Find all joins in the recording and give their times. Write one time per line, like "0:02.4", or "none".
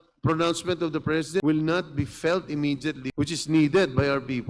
0:01.4
0:03.0